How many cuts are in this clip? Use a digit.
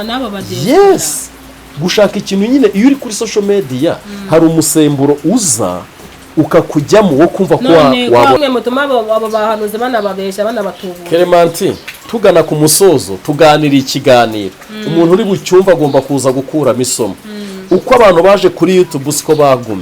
1